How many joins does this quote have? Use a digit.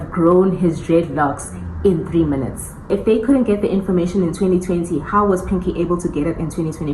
1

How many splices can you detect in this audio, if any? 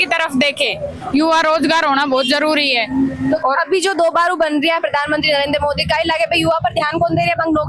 0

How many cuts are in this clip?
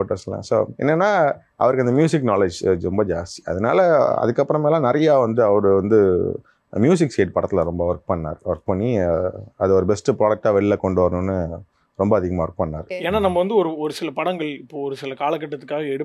0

